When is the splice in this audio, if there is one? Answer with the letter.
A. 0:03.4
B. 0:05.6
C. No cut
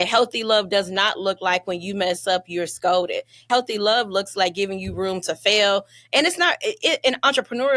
A